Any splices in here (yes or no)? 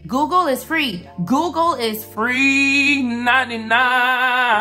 no